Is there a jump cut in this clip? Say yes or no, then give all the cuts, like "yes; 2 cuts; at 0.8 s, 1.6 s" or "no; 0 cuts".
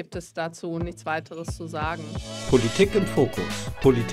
yes; 1 cut; at 2.4 s